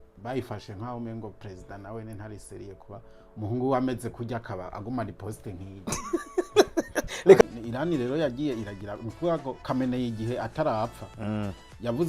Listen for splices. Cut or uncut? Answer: cut